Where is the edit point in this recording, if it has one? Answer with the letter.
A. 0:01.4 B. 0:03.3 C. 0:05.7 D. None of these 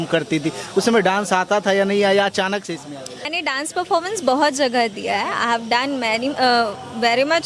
B